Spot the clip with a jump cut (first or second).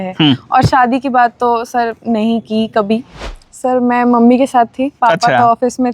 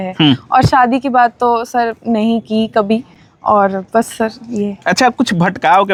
first